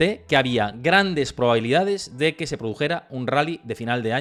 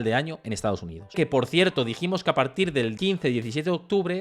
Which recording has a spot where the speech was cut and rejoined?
second; 2 cuts; at 1.1 s, 3.0 s

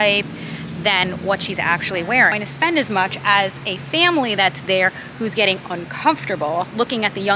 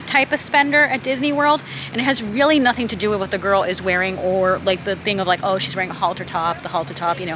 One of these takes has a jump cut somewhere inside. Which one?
first; 1 cut; at 2.3 s

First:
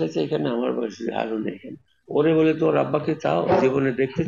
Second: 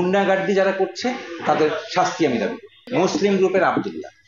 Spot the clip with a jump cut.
second; 1 cut; at 2.8 s

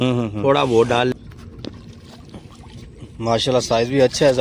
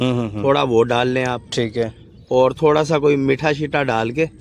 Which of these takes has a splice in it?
first; 1 cut; at 1.1 s

